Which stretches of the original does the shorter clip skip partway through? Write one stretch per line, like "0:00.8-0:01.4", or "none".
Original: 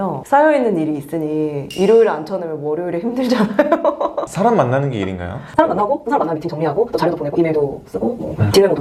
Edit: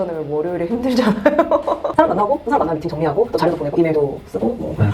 0:04.2-0:05.5